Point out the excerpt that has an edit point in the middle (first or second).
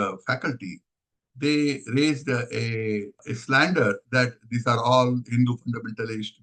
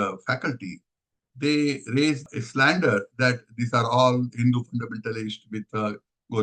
second